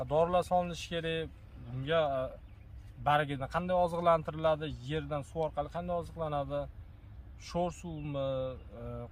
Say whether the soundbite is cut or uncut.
uncut